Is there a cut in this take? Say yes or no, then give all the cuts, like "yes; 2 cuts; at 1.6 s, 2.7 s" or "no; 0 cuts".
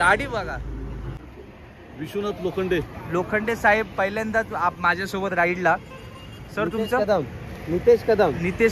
yes; 1 cut; at 1.1 s